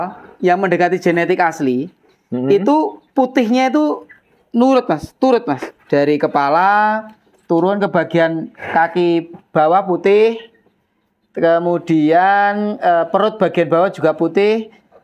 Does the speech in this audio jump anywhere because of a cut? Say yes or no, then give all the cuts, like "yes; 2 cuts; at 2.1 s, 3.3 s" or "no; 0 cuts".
no; 0 cuts